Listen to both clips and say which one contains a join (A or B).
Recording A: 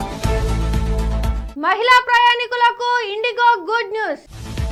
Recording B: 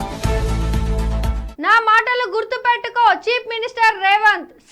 B